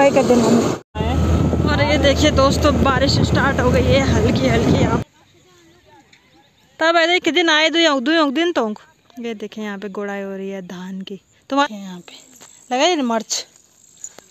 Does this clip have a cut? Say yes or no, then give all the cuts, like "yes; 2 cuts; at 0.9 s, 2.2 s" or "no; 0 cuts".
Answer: yes; 3 cuts; at 0.9 s, 5.0 s, 11.6 s